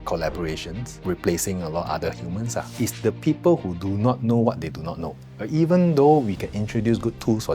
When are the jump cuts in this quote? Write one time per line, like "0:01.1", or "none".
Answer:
0:02.7
0:05.3